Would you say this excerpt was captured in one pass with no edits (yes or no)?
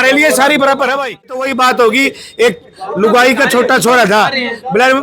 no